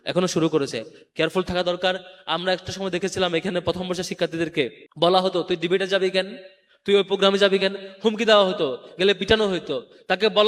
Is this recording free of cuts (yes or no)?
no